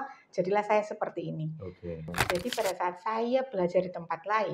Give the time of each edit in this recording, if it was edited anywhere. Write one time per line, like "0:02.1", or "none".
0:02.2